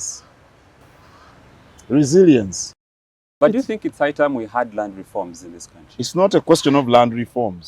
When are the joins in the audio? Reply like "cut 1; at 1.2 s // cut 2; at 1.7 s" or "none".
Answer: cut 1; at 3.2 s

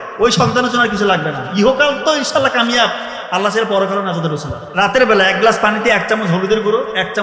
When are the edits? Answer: cut 1; at 4.7 s

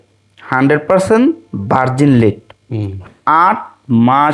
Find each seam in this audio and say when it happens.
cut 1; at 3.0 s

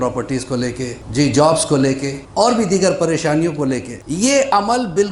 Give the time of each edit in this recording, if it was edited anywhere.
cut 1; at 1.0 s // cut 2; at 2.2 s // cut 3; at 4.0 s

